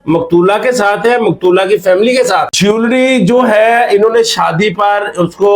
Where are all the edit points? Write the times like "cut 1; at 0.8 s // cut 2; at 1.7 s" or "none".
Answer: cut 1; at 2.5 s